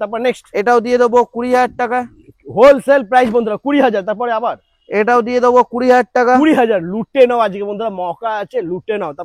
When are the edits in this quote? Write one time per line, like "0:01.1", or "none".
none